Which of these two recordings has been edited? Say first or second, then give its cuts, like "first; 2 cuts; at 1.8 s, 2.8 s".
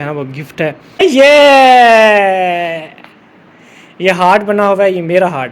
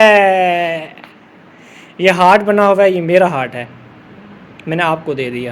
first; 1 cut; at 1.0 s